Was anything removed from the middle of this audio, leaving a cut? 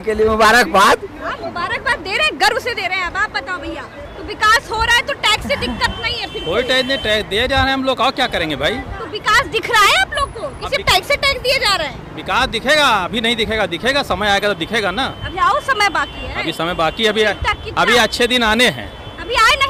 no; 0 cuts

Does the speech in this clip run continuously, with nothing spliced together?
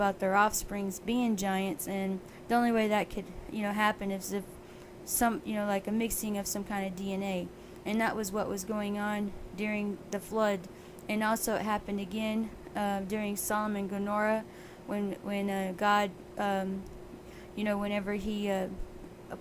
no; 1 cut; at 15.0 s

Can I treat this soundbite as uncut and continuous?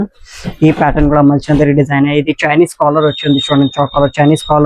yes; 0 cuts

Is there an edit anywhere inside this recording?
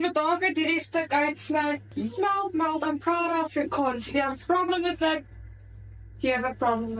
yes; 1 cut; at 1.9 s

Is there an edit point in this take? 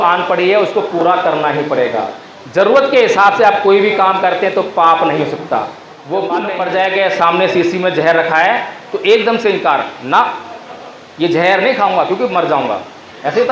yes; 1 cut; at 6.5 s

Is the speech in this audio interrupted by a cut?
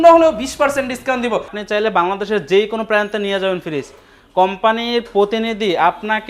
yes; 1 cut; at 1.6 s

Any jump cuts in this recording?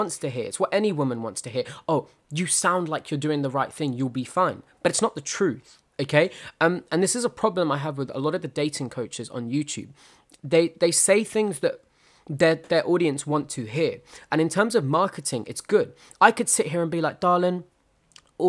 no; 0 cuts

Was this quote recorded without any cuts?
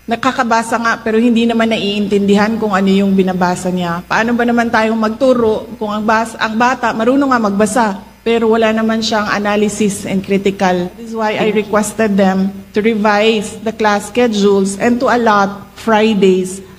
no; 1 cut; at 11.2 s

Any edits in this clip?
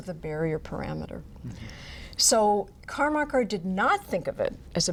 no; 0 cuts

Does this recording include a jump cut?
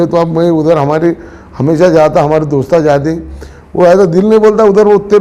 no; 0 cuts

